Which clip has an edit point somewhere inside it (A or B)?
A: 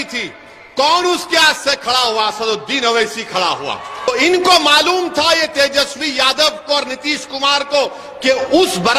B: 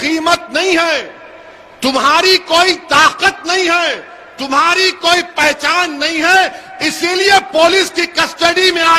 A